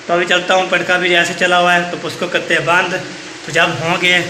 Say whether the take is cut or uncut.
uncut